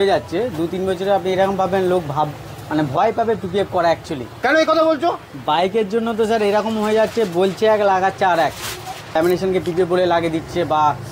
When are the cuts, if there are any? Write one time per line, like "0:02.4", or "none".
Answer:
0:09.1